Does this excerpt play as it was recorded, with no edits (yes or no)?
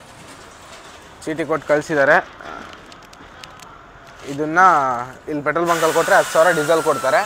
yes